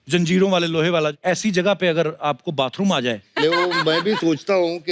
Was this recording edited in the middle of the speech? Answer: yes; 2 cuts; at 1.2 s, 3.4 s

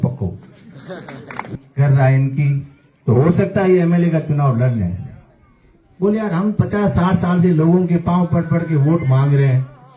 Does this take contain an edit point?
yes; 1 cut; at 1.5 s

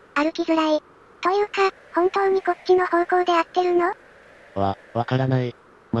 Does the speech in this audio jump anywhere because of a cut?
no; 0 cuts

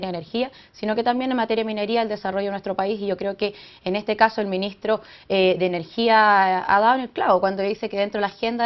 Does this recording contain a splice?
yes; 1 cut; at 4.7 s

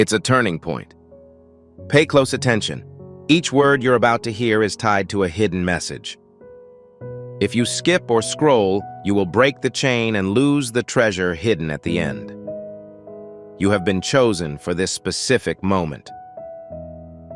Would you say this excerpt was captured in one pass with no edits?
no; 2 cuts; at 12.3 s, 13.6 s

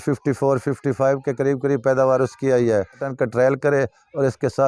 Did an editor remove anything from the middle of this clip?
yes; 1 cut; at 3.1 s

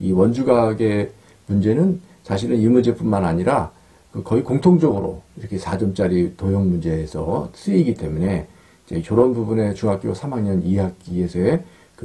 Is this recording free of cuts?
yes; 0 cuts

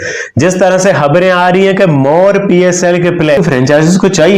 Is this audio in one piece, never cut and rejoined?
no; 1 cut; at 3.4 s

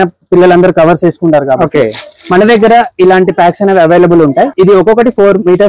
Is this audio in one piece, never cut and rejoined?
no; 1 cut; at 4.5 s

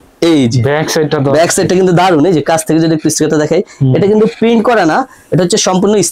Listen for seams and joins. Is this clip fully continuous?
yes; 0 cuts

